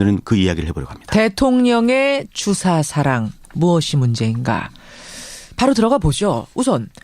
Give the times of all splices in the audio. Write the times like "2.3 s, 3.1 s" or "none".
4.8 s